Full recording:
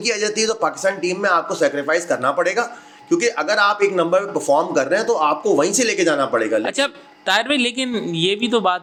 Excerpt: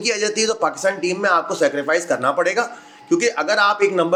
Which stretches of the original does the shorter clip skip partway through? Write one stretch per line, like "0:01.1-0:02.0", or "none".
none